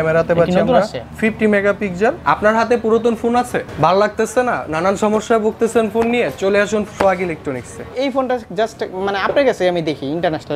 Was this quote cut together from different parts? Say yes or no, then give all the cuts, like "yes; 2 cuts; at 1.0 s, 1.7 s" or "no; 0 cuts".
yes; 4 cuts; at 1.0 s, 2.2 s, 3.6 s, 7.9 s